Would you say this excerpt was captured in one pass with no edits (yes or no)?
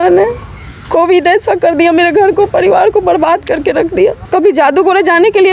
no